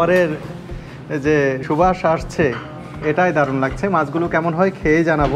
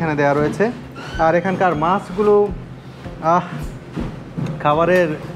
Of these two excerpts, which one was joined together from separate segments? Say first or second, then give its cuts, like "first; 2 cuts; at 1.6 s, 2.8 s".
first; 1 cut; at 1.6 s